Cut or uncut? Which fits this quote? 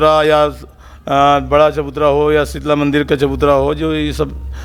uncut